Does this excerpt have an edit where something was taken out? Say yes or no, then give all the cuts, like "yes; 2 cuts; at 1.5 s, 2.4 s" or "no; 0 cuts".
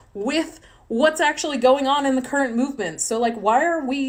no; 0 cuts